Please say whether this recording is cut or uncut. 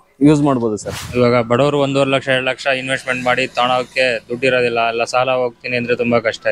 cut